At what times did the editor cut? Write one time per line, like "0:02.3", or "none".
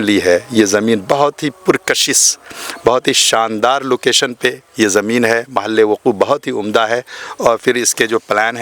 none